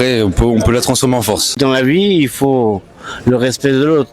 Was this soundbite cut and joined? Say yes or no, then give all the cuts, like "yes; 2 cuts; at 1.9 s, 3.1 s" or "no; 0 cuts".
yes; 1 cut; at 1.5 s